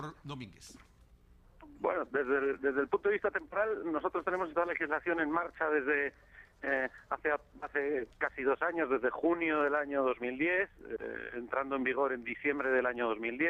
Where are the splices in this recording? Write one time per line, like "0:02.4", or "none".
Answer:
0:09.5

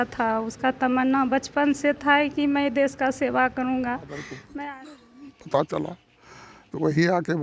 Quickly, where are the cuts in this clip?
0:04.7

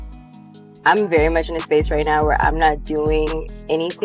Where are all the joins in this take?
none

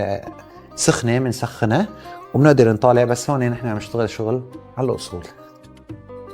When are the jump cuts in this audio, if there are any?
0:05.3

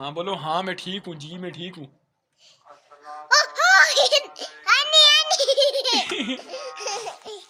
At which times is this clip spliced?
none

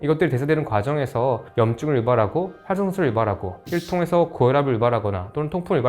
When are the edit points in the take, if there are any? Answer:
0:03.5

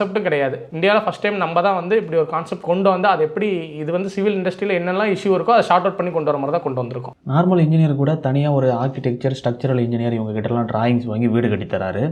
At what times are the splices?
none

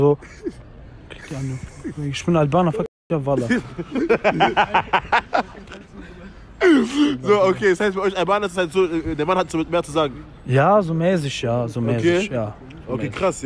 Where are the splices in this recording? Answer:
none

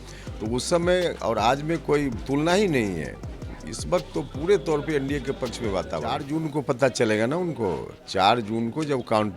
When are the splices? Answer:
0:06.2

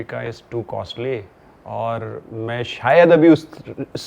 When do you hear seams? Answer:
none

